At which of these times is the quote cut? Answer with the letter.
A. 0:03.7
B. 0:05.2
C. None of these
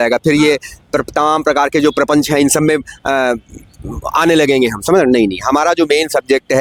C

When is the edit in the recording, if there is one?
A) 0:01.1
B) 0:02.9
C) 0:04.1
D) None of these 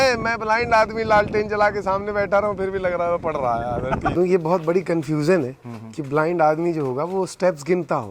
C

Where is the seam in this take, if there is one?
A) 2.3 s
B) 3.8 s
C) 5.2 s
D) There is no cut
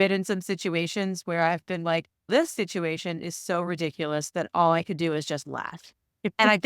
A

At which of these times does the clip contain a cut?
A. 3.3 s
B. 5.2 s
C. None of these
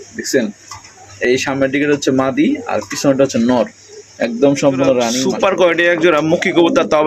B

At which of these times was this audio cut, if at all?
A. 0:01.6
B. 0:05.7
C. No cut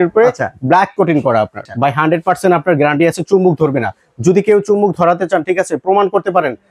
A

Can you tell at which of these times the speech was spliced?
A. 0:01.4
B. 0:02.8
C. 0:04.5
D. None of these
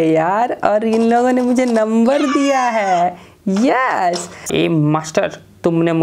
C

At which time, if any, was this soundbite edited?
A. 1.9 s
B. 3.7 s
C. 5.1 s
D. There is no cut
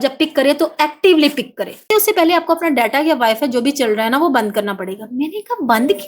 A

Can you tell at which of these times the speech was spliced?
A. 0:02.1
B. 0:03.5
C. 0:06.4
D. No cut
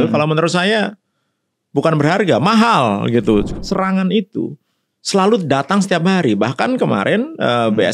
B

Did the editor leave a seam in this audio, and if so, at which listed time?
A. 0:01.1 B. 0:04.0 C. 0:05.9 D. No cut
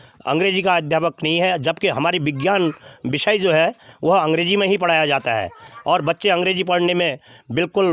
D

